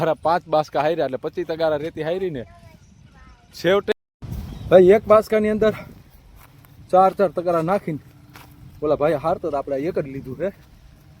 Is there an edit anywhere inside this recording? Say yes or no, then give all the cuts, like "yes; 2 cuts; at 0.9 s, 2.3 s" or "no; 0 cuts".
yes; 1 cut; at 3.9 s